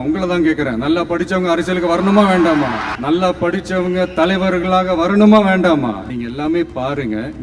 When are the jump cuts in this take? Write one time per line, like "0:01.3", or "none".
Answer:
0:02.9
0:06.1